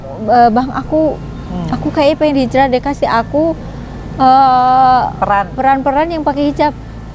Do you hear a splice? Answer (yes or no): no